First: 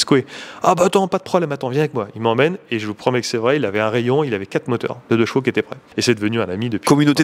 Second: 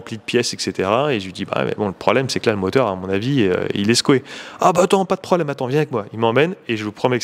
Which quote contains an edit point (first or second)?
first